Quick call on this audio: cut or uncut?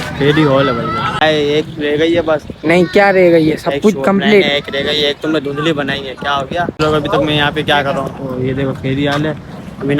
cut